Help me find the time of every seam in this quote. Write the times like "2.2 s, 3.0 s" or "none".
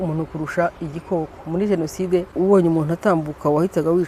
2.3 s